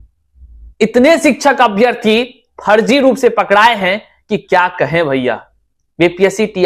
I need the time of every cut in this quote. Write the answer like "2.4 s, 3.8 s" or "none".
none